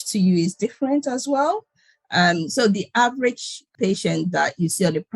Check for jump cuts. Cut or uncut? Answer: cut